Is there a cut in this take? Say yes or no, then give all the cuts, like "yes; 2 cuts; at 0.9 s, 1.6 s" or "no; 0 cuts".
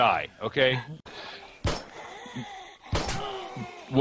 yes; 1 cut; at 1.0 s